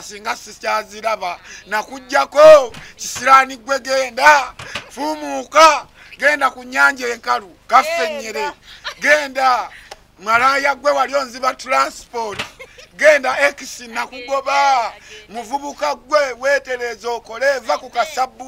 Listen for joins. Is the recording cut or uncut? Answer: uncut